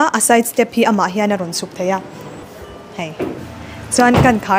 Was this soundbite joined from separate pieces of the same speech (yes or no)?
no